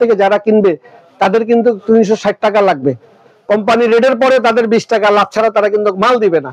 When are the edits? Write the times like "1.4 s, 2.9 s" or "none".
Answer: none